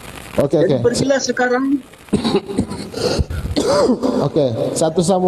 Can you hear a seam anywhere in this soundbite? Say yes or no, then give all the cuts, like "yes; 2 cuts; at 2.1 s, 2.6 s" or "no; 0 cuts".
no; 0 cuts